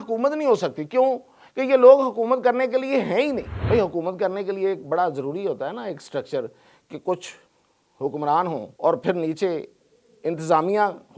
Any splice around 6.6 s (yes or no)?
no